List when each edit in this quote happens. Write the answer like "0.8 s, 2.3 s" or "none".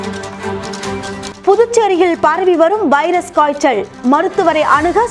1.0 s